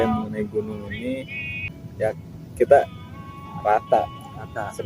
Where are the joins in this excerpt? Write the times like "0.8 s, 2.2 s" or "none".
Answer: 1.4 s